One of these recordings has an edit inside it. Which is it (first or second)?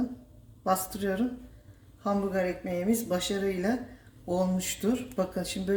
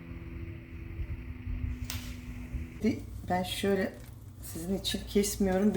second